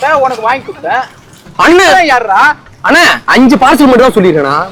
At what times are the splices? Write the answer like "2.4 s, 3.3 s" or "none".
none